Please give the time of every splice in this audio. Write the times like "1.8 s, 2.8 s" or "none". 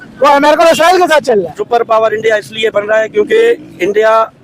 1.6 s